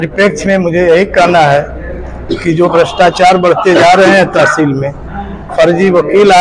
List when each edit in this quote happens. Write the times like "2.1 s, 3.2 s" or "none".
none